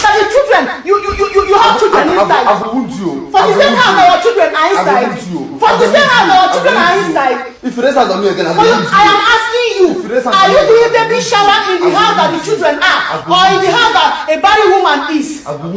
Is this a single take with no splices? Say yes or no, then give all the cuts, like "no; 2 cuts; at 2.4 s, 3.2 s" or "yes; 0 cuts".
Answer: yes; 0 cuts